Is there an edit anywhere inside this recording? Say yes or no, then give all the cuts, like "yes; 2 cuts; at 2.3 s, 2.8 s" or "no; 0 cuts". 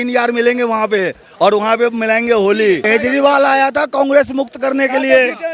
yes; 1 cut; at 2.9 s